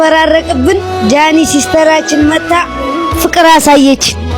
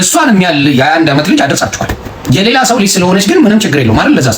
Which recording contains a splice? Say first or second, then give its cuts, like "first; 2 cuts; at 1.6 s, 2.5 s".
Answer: second; 1 cut; at 2.1 s